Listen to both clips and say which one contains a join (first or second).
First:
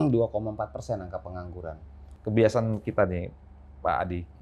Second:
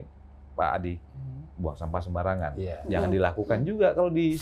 first